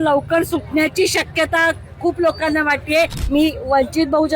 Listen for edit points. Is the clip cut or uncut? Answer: cut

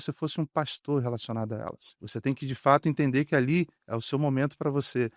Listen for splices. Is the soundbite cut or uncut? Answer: cut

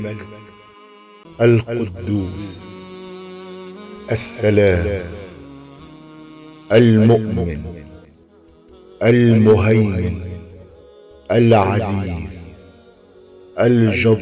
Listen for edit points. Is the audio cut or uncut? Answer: cut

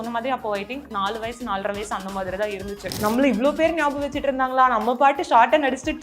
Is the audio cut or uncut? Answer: cut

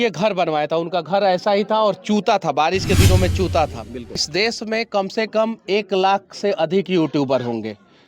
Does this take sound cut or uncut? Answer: cut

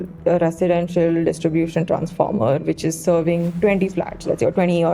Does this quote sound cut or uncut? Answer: uncut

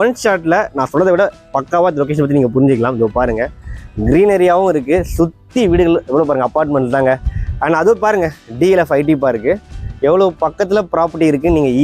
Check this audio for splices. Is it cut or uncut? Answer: uncut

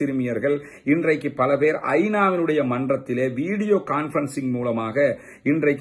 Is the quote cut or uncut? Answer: uncut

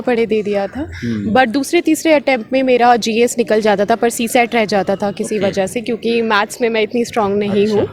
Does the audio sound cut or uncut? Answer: uncut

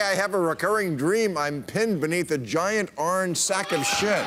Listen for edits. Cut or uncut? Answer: uncut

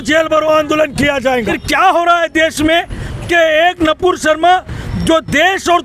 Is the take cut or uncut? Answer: cut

